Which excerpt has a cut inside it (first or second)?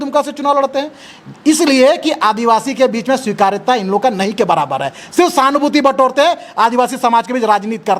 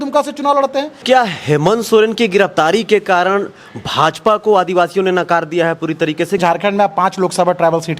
second